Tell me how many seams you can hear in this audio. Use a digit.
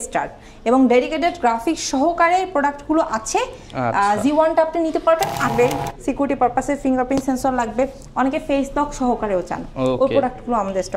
1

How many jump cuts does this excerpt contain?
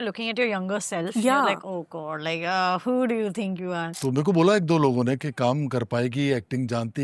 1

